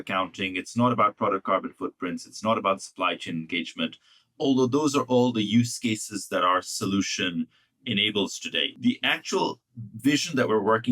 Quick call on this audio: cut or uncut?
cut